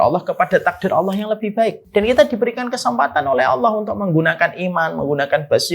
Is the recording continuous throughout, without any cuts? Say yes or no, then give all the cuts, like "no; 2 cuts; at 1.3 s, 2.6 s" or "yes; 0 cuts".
no; 1 cut; at 1.8 s